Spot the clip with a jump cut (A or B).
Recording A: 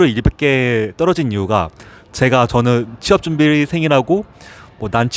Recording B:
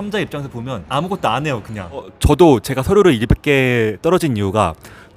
B